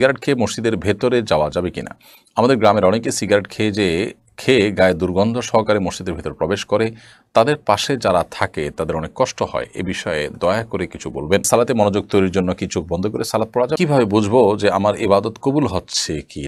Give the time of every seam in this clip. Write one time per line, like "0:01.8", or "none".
0:11.4
0:13.8